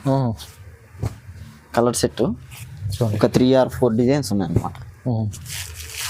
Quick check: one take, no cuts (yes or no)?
yes